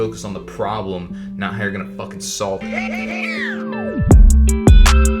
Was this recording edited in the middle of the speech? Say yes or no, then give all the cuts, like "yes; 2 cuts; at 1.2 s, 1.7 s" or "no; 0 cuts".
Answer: yes; 1 cut; at 2.6 s